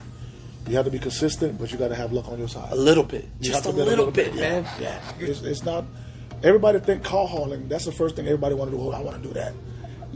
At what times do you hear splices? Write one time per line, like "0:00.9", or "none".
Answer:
0:05.2

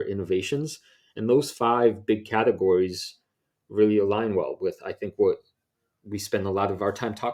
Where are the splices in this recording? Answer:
none

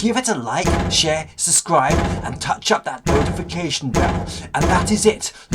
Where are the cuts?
none

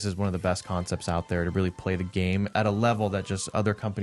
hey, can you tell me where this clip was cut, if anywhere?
0:02.5

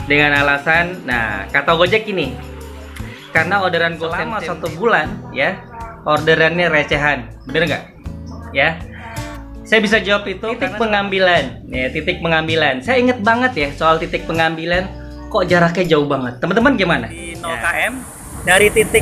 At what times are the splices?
0:04.3
0:10.4
0:17.4

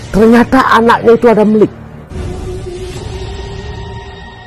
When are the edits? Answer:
0:02.0
0:03.1

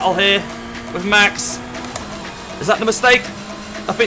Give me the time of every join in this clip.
0:02.2

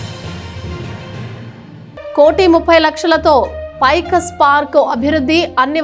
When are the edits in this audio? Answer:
0:02.1

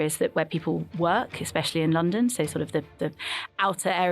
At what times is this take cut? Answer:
none

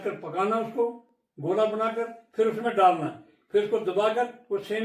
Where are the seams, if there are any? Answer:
none

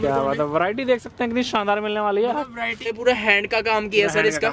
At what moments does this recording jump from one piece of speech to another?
0:03.0

